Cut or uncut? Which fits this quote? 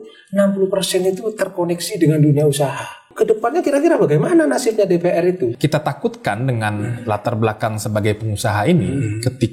cut